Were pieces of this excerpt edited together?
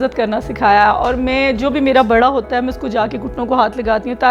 no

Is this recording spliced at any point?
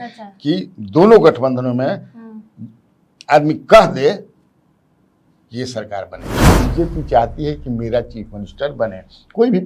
yes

